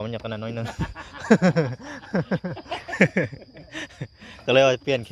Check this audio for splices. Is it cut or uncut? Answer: uncut